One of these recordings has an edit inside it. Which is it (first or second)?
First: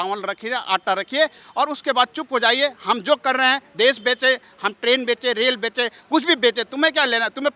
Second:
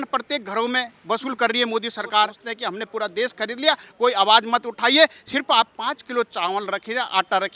second